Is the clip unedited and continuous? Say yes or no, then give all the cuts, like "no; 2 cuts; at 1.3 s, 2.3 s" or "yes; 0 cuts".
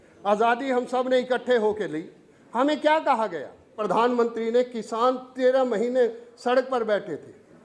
no; 1 cut; at 3.8 s